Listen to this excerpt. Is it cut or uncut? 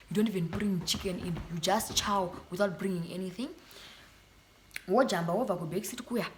uncut